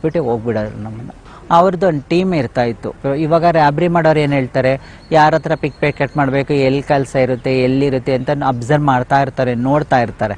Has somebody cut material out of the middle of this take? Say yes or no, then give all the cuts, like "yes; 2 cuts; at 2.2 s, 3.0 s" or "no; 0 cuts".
no; 0 cuts